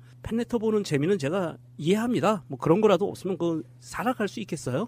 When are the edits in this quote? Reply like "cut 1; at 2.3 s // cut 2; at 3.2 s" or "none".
cut 1; at 2.6 s